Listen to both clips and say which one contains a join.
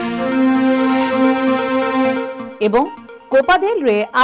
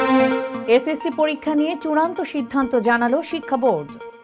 first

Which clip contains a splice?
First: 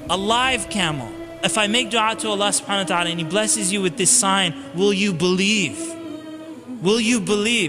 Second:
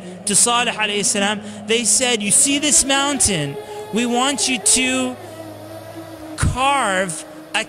first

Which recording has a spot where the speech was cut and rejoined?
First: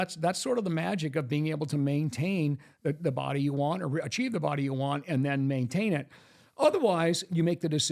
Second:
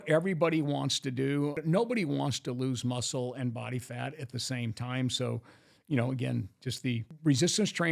second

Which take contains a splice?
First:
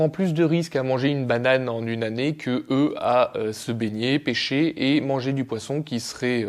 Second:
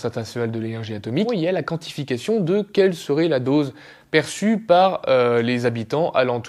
second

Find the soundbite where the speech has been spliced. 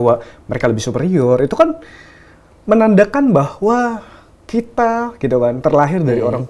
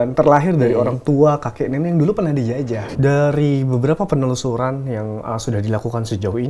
second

